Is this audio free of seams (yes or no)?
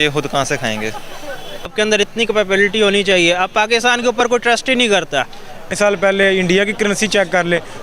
no